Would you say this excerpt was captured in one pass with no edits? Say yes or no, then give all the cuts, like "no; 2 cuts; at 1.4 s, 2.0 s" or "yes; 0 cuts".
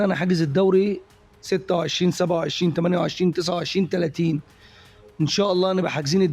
yes; 0 cuts